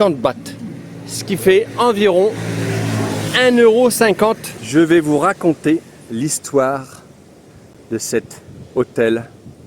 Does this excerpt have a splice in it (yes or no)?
yes